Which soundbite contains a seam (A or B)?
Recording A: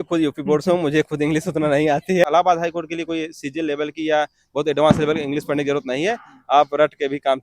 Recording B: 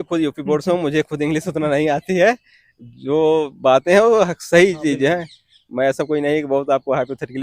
A